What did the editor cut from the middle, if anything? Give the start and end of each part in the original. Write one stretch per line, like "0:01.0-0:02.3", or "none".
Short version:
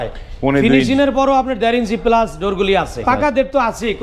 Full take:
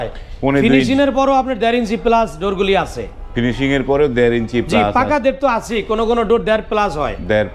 0:03.0-0:04.9